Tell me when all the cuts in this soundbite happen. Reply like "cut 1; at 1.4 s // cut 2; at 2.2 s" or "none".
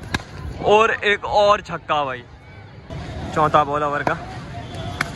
cut 1; at 2.9 s